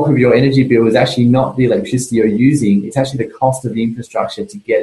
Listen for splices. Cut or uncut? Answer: uncut